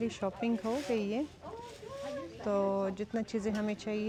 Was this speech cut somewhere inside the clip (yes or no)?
no